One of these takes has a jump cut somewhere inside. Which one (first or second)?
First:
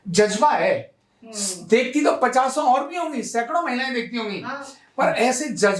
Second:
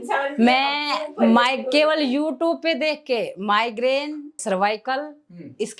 second